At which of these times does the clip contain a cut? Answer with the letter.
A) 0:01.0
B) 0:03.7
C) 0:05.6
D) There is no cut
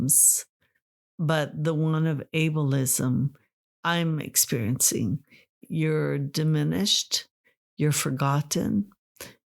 C